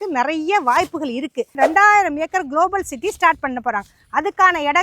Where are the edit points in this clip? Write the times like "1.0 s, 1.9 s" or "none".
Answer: 1.5 s